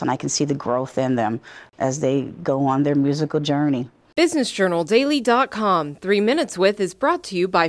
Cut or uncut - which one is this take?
cut